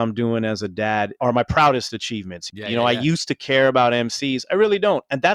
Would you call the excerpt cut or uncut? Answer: cut